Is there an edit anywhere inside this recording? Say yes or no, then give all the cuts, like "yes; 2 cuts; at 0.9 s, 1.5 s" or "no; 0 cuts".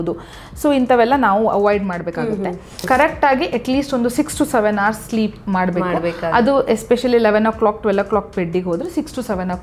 yes; 1 cut; at 2.8 s